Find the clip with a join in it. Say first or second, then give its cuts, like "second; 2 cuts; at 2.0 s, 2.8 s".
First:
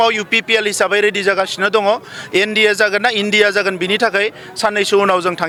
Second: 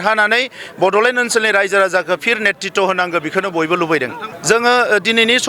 second; 1 cut; at 4.3 s